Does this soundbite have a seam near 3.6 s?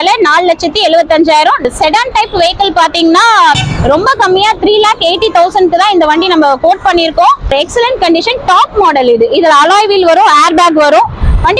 yes; 3 cuts; at 1.6 s, 3.6 s, 7.5 s

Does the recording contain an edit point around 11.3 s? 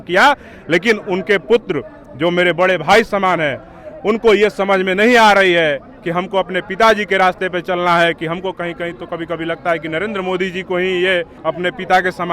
yes; 1 cut; at 11.3 s

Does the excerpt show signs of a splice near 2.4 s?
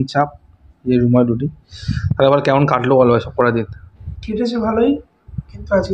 no; 0 cuts

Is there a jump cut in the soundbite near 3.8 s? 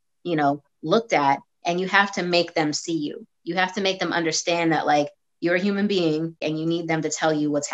no; 1 cut; at 6.5 s

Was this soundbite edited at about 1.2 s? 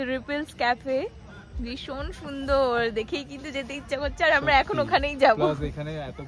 no; 0 cuts

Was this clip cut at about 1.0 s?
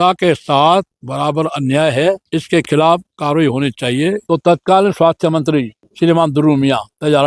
yes; 4 cuts; at 1.0 s, 2.2 s, 4.2 s, 5.8 s

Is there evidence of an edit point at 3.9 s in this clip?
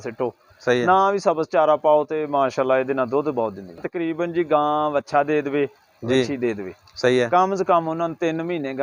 yes; 1 cut; at 3.9 s

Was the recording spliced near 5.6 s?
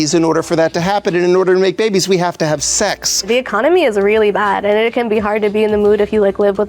no; 1 cut; at 3.3 s

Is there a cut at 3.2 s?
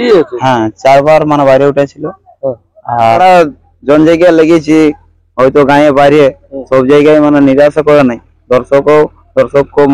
yes; 1 cut; at 3.2 s

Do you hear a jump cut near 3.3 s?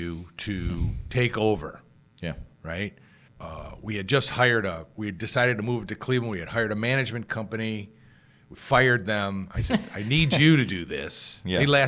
yes; 1 cut; at 3.3 s

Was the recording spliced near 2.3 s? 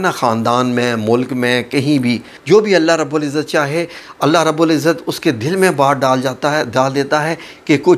yes; 1 cut; at 2.3 s

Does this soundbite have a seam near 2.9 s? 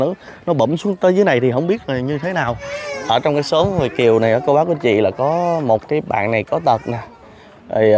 yes; 1 cut; at 2.9 s

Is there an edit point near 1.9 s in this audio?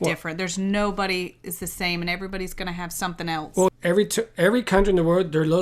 no; 1 cut; at 3.7 s

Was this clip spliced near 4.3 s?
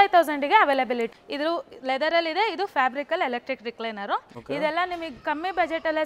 yes; 2 cuts; at 1.1 s, 4.3 s

